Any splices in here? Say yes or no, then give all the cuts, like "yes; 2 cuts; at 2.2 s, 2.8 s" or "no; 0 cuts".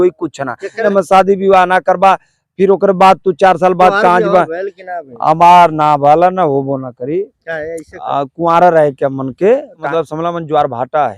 yes; 2 cuts; at 0.8 s, 9.8 s